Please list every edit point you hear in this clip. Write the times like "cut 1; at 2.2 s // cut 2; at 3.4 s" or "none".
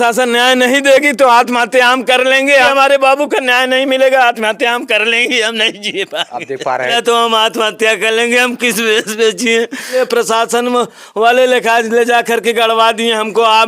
cut 1; at 2.7 s // cut 2; at 6.9 s // cut 3; at 9.9 s